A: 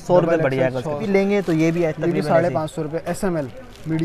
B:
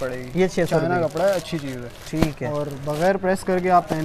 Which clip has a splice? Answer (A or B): A